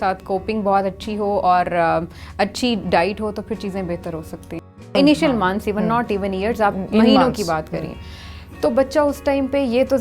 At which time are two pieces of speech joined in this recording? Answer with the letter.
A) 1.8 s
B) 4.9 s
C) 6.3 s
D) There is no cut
B